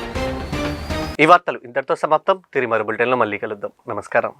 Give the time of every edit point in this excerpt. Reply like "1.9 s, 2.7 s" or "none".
none